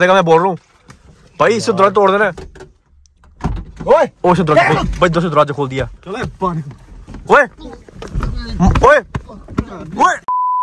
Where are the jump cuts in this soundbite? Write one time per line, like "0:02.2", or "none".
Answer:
none